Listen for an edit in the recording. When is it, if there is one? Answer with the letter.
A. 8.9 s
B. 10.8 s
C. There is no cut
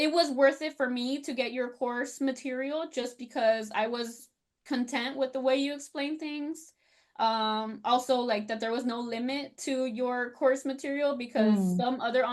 C